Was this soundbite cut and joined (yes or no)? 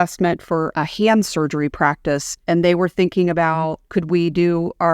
yes